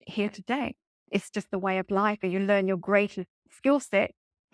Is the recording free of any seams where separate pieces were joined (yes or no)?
no